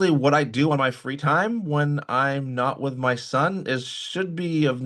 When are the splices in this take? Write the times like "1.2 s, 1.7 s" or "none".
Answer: none